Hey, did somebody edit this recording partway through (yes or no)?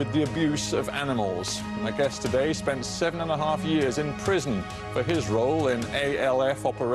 no